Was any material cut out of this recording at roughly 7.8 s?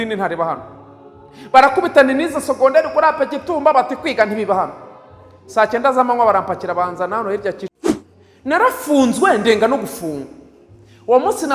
yes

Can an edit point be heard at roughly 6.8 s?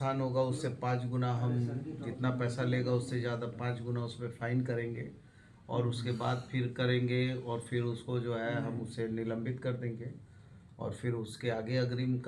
no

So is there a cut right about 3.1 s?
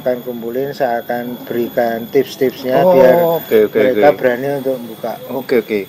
no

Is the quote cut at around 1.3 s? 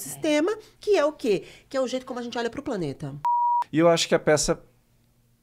no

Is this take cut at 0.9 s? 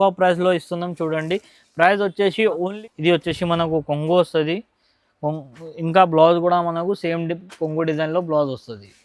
no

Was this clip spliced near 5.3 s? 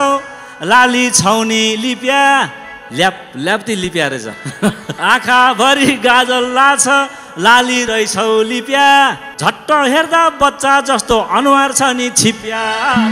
no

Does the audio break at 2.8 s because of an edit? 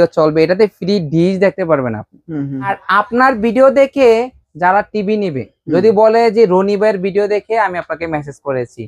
yes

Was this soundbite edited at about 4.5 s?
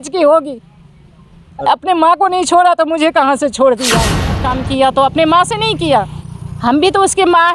yes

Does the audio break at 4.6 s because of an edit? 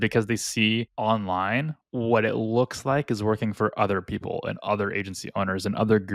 no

